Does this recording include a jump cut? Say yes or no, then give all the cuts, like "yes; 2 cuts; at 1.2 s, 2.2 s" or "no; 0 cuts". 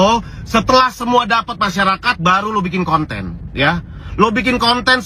no; 0 cuts